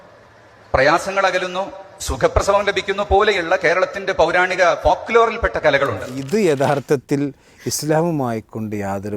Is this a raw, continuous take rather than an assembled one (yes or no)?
no